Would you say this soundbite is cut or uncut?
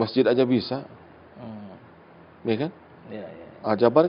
uncut